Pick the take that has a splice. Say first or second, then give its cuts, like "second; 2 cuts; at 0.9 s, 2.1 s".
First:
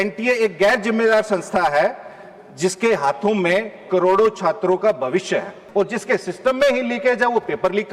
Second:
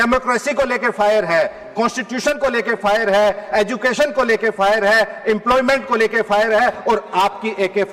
first; 1 cut; at 5.6 s